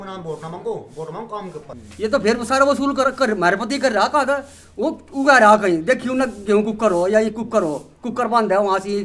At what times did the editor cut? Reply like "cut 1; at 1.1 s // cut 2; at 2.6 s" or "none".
cut 1; at 1.6 s